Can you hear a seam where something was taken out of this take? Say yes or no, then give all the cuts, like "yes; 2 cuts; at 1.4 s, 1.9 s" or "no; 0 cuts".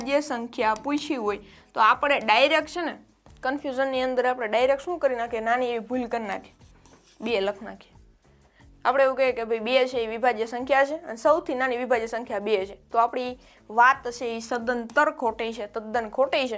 no; 0 cuts